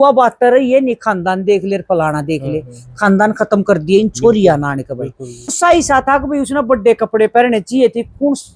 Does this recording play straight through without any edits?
no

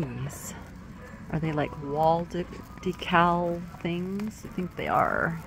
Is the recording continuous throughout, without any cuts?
yes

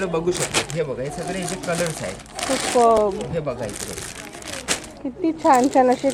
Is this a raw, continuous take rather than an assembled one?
yes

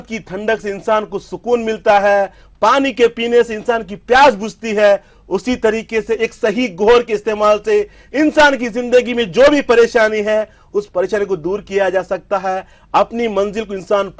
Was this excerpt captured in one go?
yes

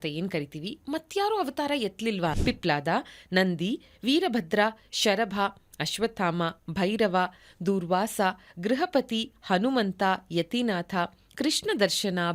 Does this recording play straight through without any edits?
no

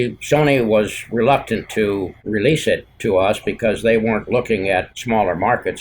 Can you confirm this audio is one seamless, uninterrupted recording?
no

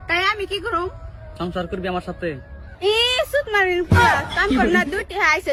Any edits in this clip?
no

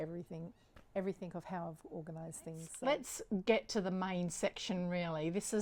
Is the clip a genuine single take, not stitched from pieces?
no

